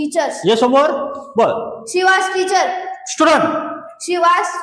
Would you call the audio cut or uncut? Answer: uncut